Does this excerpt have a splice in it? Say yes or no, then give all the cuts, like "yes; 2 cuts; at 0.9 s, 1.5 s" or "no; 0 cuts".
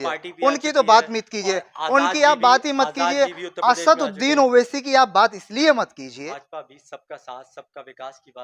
yes; 1 cut; at 6.1 s